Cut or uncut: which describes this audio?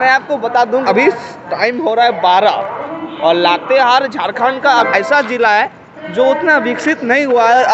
cut